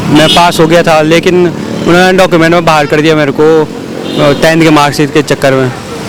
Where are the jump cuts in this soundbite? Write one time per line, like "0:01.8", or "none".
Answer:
none